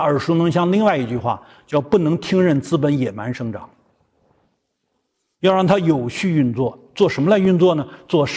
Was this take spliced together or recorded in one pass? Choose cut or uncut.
uncut